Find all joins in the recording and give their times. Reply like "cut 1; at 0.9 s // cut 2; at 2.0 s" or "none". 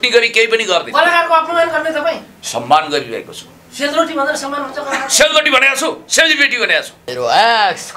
cut 1; at 7.0 s